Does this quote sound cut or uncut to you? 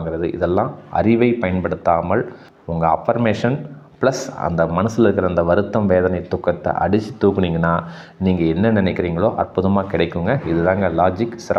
uncut